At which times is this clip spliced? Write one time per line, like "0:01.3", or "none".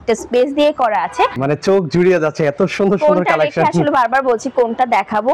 0:01.4